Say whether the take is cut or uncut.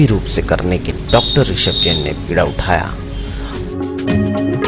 uncut